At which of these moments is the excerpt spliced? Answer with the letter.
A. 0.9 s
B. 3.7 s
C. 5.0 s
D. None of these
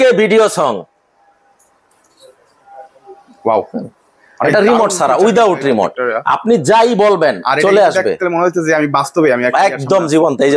D